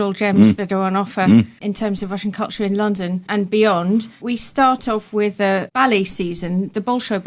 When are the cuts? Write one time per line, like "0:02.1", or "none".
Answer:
0:04.8